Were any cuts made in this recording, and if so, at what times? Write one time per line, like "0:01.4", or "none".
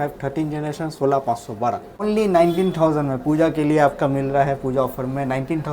0:02.0

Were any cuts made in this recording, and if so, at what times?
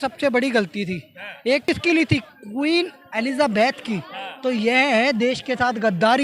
0:01.6

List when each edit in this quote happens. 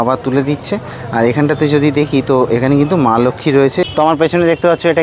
0:03.8

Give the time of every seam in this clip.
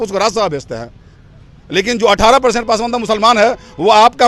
none

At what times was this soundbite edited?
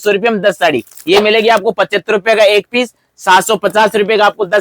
0:00.9

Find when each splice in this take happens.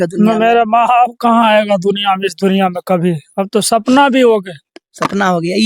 none

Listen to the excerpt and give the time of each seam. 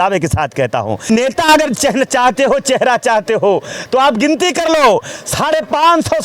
0:01.1

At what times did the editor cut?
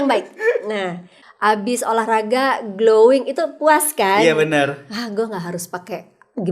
0:01.2

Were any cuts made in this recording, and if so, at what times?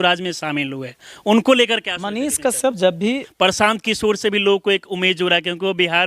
0:03.3

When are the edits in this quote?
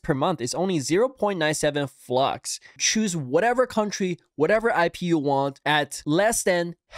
0:02.6

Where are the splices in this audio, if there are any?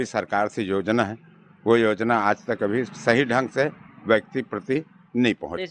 none

